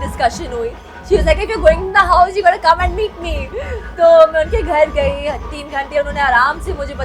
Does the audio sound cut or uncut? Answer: uncut